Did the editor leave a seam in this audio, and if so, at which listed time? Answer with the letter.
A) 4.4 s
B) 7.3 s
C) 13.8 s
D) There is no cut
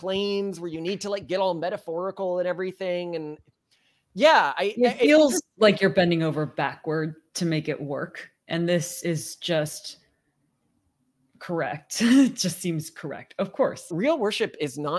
C